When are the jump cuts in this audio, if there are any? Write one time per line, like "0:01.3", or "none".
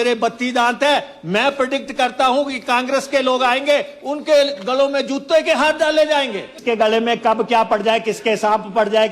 0:06.5

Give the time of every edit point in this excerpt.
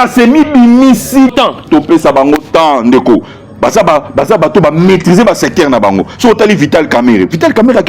0:01.3

